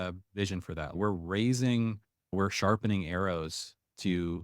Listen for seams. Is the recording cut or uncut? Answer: cut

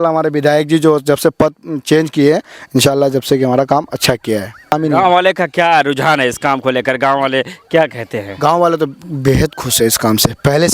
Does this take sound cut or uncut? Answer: cut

